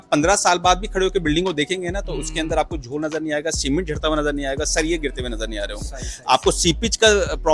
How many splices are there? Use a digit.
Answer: 0